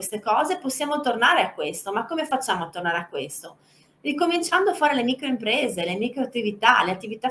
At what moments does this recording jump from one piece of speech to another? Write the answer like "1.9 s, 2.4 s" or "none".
none